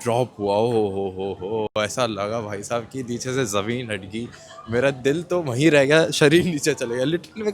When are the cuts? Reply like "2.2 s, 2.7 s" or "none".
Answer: none